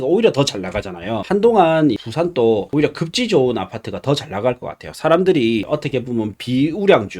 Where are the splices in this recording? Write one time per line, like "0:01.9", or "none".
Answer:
0:01.2
0:02.0
0:02.7
0:05.7